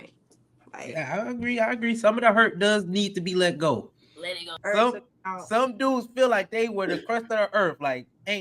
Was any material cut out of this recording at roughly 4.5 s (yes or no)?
yes